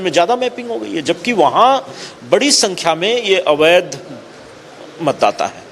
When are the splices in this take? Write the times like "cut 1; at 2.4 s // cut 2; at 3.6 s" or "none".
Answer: none